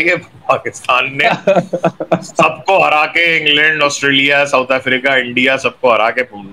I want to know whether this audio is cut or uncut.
uncut